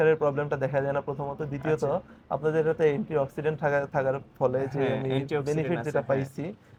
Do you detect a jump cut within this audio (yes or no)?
no